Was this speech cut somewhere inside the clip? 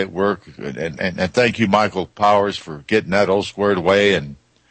yes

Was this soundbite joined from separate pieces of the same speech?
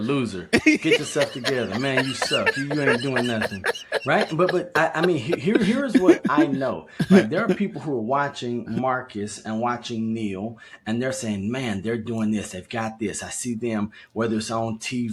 no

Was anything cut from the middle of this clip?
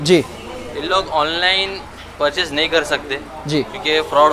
no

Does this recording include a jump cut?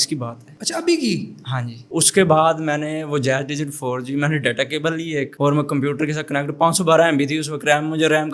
no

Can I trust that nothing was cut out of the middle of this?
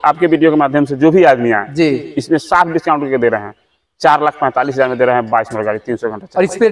yes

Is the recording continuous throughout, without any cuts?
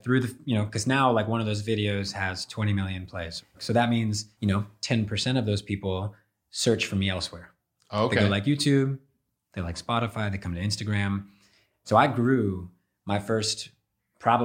no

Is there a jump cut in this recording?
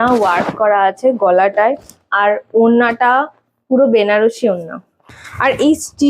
yes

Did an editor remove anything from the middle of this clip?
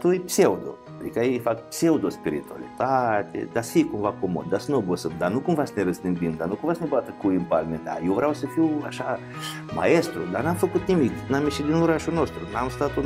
no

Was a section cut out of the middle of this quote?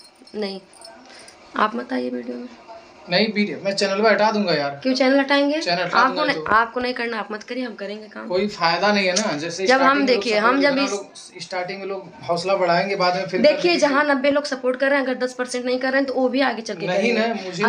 no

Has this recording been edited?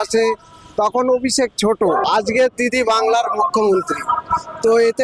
yes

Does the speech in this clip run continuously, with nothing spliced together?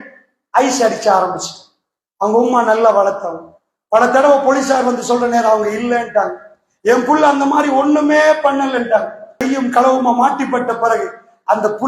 no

